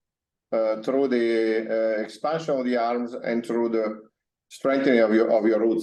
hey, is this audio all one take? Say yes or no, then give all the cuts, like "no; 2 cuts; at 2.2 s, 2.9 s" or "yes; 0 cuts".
yes; 0 cuts